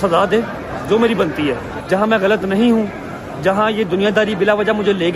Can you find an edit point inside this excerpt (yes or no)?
yes